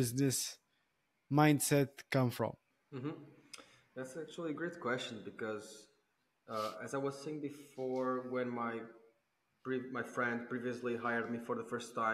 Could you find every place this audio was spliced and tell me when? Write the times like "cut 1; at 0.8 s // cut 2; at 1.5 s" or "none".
cut 1; at 2.7 s